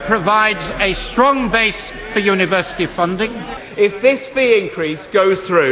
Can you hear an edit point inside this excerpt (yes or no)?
yes